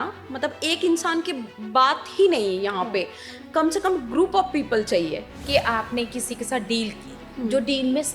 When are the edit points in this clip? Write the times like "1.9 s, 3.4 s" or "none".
5.3 s